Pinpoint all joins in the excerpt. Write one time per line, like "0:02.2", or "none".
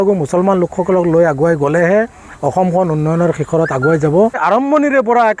0:04.4